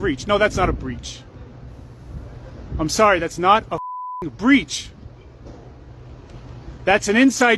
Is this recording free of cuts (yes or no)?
yes